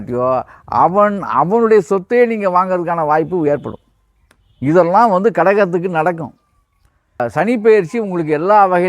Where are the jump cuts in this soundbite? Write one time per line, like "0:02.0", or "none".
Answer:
0:07.2